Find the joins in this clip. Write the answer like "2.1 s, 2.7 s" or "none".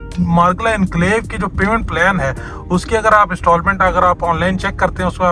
none